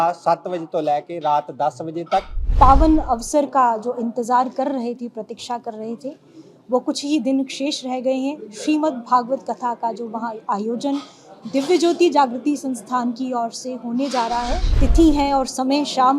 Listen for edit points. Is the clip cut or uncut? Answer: cut